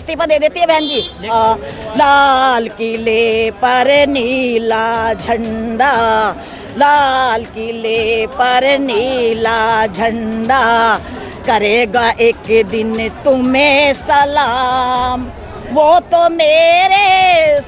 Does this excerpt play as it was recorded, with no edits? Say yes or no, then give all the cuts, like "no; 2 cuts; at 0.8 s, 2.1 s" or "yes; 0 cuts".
no; 1 cut; at 1.3 s